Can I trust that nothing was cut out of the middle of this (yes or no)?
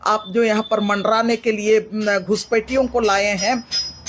yes